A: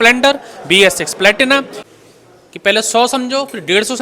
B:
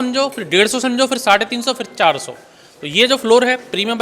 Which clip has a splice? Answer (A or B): A